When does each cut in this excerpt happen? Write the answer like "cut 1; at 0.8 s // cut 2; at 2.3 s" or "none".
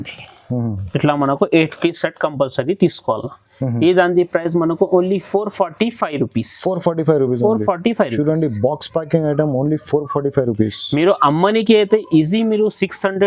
none